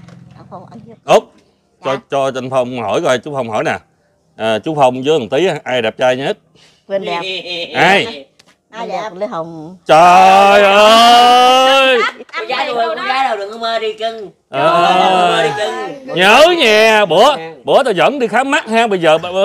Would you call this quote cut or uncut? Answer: cut